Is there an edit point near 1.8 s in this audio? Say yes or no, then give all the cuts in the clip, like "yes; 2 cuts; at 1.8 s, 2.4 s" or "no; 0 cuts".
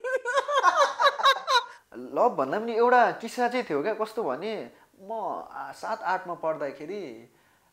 yes; 1 cut; at 1.8 s